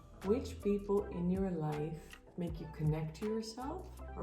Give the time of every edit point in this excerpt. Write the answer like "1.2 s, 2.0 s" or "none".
2.2 s